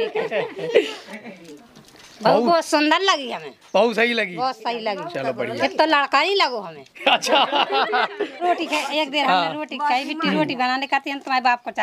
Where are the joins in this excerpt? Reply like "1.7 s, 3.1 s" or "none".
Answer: 1.1 s, 8.4 s